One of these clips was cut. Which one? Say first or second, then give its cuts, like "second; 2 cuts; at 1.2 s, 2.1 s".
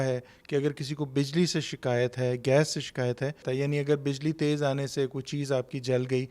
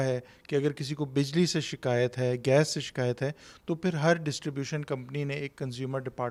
first; 1 cut; at 3.4 s